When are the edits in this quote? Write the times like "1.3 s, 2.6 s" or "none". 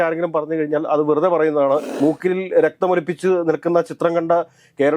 1.9 s